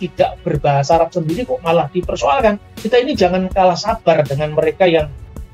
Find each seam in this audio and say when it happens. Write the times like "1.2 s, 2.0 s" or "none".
2.7 s